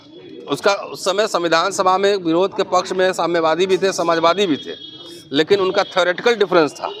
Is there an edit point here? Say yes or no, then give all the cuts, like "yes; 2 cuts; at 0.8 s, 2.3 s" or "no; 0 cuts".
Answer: no; 0 cuts